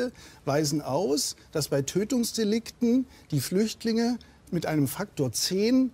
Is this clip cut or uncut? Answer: uncut